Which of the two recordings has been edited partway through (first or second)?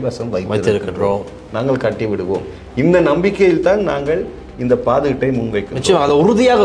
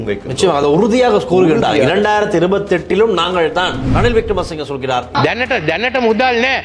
second